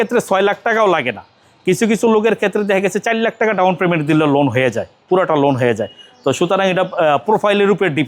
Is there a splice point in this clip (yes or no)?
no